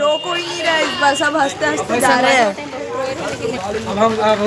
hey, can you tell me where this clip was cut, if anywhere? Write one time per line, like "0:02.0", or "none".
0:03.6